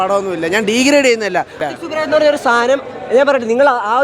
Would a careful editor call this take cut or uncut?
cut